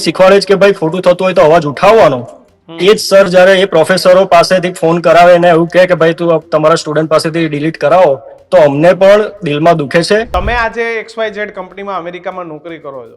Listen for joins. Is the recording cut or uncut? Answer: cut